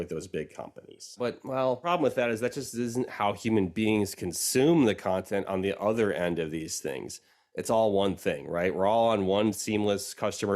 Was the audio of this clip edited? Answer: yes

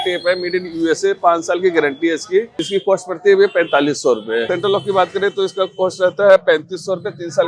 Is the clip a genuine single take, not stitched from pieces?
no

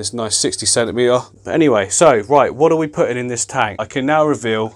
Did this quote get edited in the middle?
yes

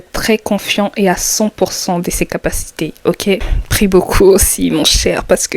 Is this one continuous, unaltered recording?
no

